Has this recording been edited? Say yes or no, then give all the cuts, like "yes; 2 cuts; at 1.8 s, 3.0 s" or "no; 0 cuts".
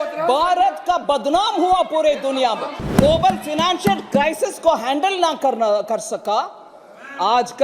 yes; 1 cut; at 2.8 s